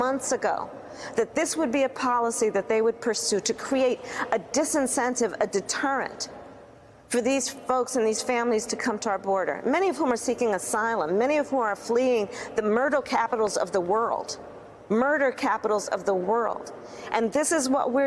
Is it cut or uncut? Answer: uncut